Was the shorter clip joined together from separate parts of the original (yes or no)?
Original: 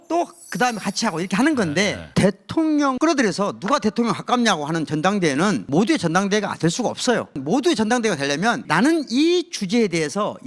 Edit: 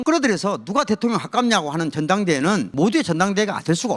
no